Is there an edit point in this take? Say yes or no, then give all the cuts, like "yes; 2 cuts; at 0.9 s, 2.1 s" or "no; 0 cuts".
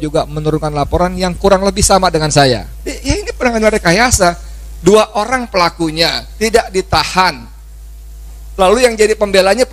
yes; 1 cut; at 3.0 s